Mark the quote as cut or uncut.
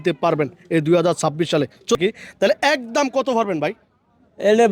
cut